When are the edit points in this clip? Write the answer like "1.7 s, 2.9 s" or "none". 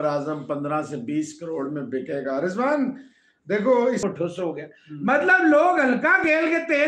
4.0 s